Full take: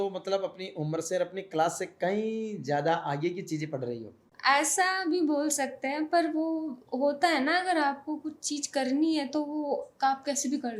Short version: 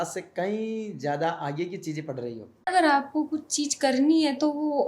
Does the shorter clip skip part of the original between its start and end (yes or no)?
yes